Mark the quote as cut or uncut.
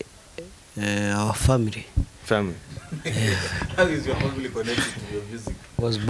uncut